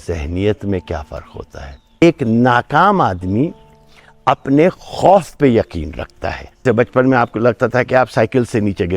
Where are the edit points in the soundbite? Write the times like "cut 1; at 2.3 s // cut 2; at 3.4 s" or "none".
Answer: cut 1; at 2.0 s // cut 2; at 6.6 s

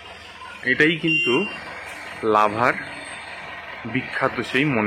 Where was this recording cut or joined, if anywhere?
none

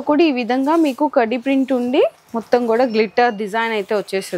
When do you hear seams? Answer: none

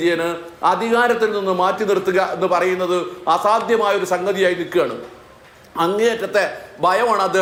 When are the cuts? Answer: none

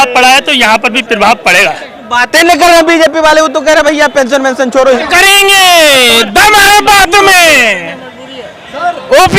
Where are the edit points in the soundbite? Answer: cut 1; at 1.9 s // cut 2; at 5.0 s

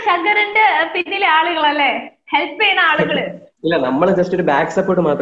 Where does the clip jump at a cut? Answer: none

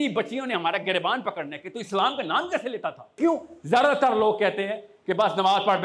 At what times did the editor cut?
cut 1; at 3.2 s

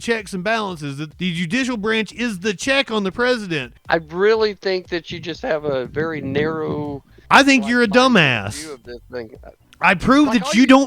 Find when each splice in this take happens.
cut 1; at 1.1 s // cut 2; at 3.7 s // cut 3; at 9.4 s

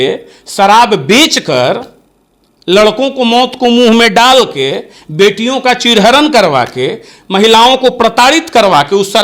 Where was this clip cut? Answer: none

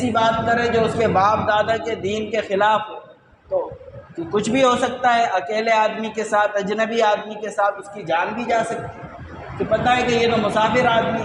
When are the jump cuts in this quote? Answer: none

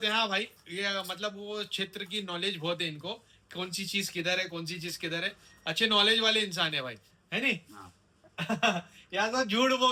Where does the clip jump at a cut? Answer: none

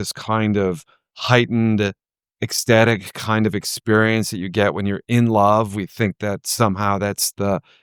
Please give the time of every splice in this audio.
none

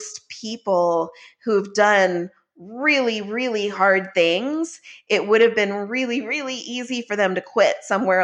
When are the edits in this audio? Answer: none

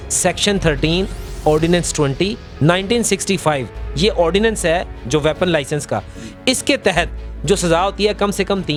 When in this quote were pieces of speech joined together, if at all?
none

